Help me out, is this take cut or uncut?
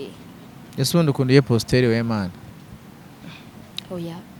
uncut